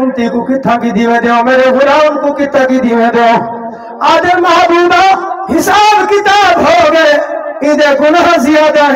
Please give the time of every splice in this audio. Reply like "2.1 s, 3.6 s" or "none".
none